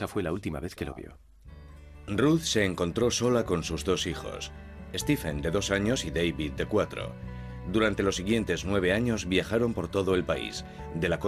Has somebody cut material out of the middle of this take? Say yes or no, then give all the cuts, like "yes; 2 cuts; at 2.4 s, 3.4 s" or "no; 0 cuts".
no; 0 cuts